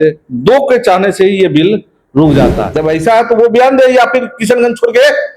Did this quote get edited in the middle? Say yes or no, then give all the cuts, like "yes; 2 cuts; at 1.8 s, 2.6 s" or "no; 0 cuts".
yes; 1 cut; at 2.7 s